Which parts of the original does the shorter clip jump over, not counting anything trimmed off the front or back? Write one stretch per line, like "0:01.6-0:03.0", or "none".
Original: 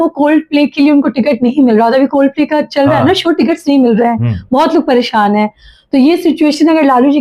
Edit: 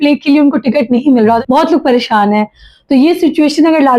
0:01.9-0:04.4